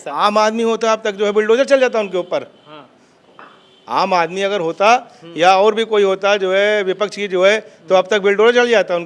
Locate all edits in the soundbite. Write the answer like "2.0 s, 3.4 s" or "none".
none

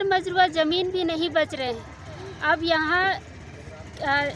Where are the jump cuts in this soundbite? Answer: none

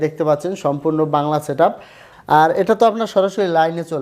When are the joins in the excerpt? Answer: 2.0 s

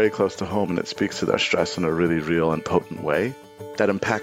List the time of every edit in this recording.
2.6 s

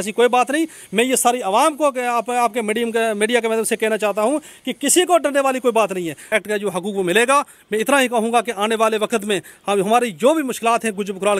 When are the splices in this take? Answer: 6.2 s

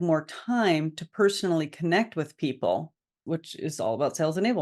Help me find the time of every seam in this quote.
3.1 s

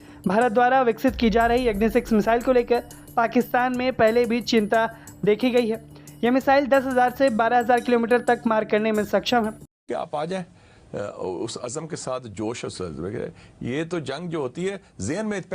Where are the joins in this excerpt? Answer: 9.9 s

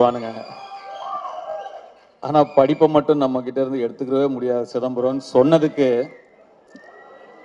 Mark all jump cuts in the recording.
none

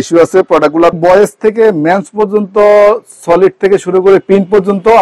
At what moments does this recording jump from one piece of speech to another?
1.0 s

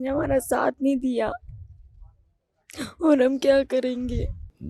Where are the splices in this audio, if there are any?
none

